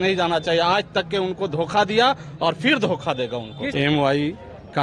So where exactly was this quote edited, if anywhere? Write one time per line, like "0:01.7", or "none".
0:03.7